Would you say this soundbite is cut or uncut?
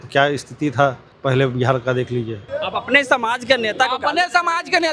cut